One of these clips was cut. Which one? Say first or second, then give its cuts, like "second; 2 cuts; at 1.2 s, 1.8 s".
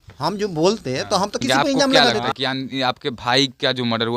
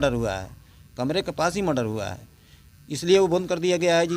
first; 1 cut; at 2.3 s